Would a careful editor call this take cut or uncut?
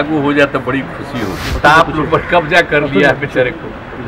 cut